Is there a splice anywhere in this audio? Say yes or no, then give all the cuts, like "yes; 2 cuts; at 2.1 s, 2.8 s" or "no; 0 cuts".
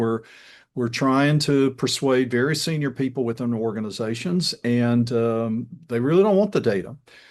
no; 0 cuts